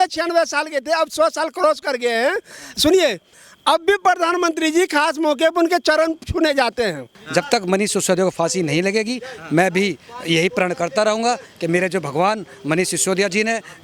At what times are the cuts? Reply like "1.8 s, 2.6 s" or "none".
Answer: 7.2 s